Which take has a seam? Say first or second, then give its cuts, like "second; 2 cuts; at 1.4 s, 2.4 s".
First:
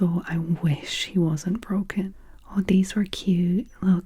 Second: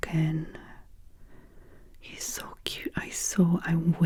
first; 1 cut; at 2.0 s